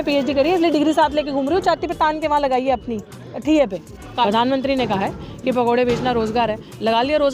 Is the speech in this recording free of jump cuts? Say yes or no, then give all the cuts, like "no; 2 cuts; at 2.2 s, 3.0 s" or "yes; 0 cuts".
no; 1 cut; at 4.3 s